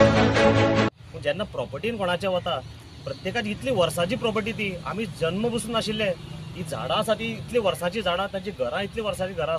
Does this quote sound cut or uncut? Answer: cut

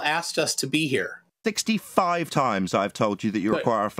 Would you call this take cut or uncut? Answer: cut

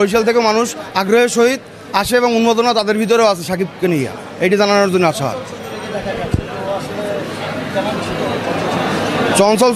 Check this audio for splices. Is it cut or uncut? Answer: uncut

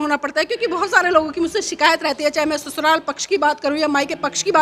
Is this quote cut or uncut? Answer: uncut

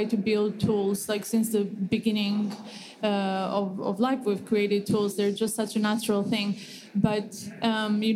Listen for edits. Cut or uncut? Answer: uncut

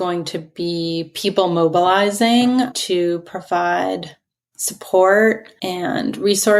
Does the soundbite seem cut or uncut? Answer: cut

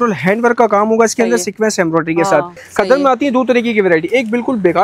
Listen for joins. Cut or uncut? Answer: cut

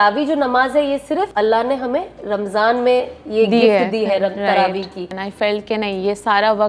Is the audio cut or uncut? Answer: cut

